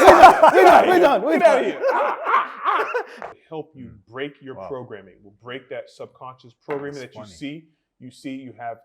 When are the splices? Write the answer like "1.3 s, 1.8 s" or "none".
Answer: 3.2 s